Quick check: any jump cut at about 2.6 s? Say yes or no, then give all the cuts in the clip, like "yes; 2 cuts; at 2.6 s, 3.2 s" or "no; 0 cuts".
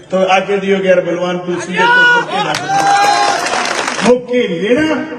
no; 1 cut; at 3.9 s